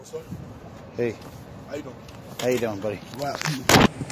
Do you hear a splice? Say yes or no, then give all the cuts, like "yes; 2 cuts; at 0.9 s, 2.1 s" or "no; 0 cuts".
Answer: no; 0 cuts